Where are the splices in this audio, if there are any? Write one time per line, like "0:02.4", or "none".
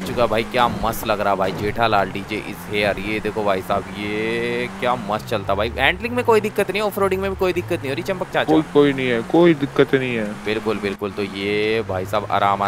none